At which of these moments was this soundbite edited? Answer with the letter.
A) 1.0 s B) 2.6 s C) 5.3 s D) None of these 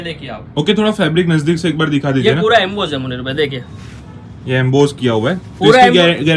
D